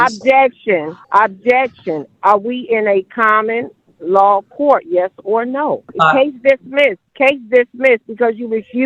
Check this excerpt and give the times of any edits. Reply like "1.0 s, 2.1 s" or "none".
1.0 s, 5.9 s, 7.0 s